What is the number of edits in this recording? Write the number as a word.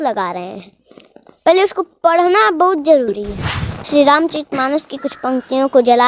one